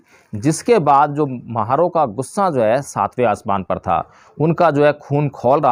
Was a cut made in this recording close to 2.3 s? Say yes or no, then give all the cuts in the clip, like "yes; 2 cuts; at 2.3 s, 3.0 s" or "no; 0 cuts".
no; 0 cuts